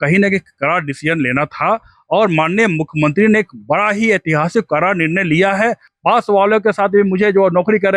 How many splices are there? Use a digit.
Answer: 1